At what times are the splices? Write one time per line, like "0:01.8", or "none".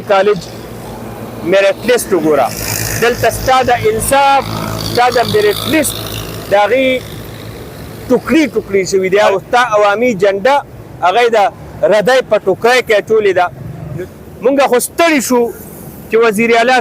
0:09.3
0:13.8